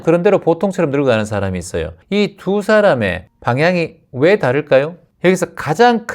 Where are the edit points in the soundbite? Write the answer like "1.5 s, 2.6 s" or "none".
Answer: 1.9 s, 3.2 s, 5.0 s